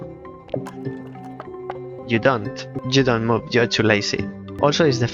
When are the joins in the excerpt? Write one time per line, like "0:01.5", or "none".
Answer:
0:02.0
0:02.7